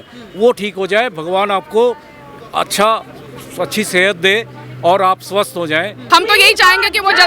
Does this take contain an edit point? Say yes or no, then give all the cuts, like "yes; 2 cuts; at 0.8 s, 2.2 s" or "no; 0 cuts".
yes; 1 cut; at 6.0 s